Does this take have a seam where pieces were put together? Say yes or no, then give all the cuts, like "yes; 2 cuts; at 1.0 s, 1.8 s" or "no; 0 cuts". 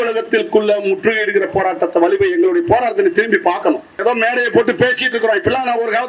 yes; 1 cut; at 4.0 s